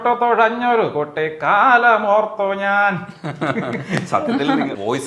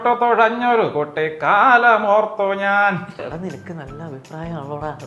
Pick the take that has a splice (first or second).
second